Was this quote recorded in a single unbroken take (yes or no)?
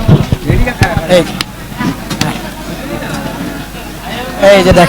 yes